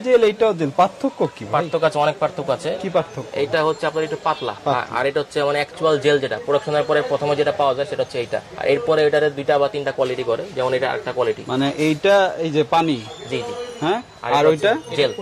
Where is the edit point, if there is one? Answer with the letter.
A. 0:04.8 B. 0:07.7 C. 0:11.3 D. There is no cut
D